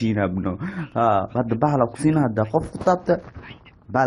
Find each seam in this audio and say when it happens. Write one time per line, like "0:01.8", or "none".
0:01.3

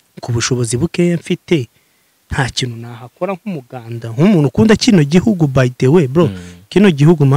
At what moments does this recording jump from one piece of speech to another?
none

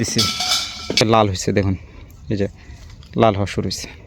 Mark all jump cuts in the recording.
0:01.0

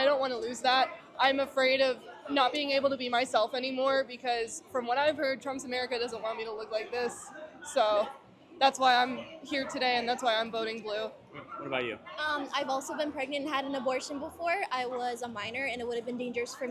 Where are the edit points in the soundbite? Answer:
0:02.4
0:07.7

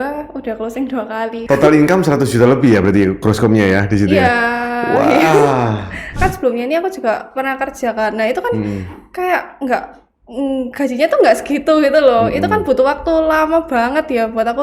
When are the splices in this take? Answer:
0:01.4
0:06.1

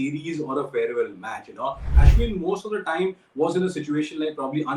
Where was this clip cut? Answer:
0:01.9

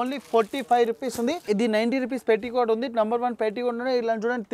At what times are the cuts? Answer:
0:01.4

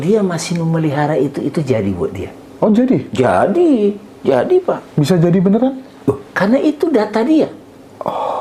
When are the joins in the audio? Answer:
none

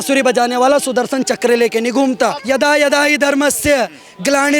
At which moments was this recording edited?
0:02.4

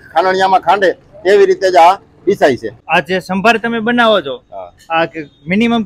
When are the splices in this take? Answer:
0:02.7

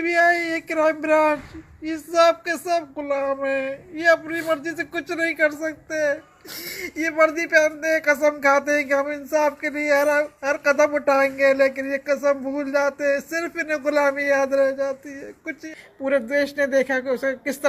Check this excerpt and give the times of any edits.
0:15.6

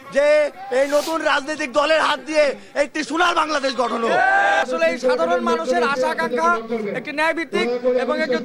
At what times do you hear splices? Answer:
0:04.6

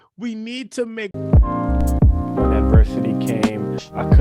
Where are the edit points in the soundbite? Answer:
0:01.1

